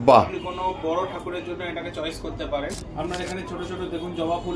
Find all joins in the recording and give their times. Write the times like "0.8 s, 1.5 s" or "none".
2.6 s